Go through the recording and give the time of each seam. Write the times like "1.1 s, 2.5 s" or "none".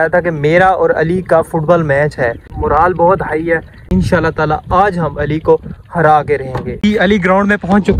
none